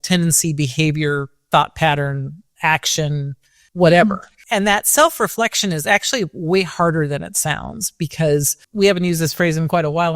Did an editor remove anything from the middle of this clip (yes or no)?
yes